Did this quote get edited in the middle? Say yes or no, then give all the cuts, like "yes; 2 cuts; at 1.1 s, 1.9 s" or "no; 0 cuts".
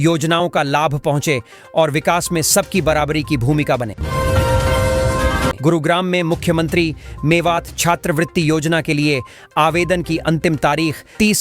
yes; 2 cuts; at 4.0 s, 5.6 s